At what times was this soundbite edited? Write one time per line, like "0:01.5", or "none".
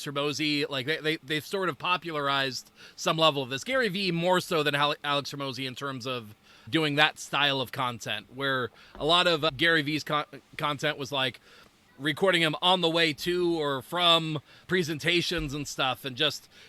0:11.8